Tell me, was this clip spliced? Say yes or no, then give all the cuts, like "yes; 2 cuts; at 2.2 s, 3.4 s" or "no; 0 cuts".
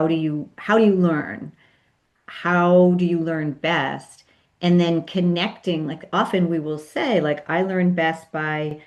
no; 0 cuts